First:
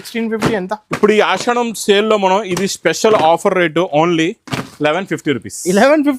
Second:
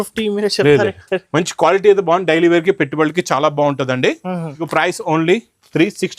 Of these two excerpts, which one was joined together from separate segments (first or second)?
second